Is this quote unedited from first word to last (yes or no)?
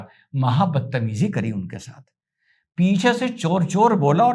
yes